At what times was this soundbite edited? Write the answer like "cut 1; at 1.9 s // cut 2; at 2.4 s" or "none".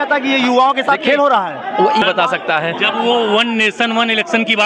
cut 1; at 2.0 s